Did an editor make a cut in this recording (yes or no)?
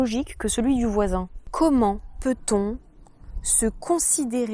yes